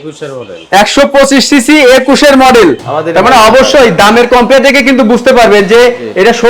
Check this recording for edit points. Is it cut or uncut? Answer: cut